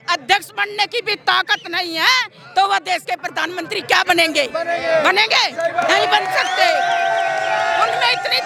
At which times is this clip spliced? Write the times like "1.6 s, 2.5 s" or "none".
none